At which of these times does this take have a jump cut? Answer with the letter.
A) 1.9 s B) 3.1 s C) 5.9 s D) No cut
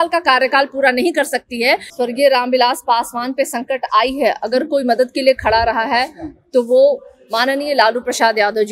A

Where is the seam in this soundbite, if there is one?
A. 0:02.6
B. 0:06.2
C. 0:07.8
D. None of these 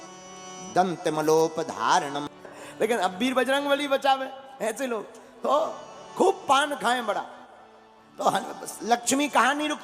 A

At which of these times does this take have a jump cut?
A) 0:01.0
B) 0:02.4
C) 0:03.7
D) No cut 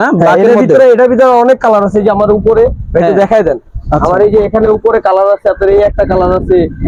D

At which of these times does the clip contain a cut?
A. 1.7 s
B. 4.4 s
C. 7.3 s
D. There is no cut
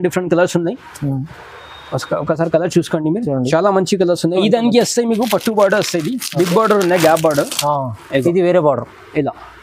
B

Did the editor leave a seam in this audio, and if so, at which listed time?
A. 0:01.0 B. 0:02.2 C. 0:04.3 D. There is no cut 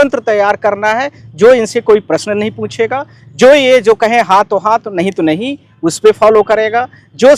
D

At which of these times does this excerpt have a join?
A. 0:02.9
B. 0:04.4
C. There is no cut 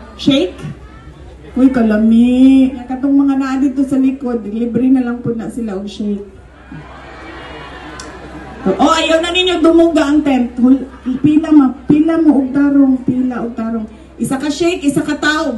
A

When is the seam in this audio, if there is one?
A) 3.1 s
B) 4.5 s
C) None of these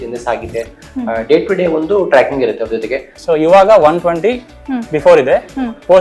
A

